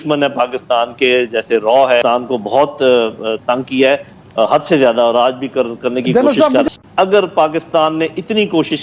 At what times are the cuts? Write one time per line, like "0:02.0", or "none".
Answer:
0:02.0
0:06.8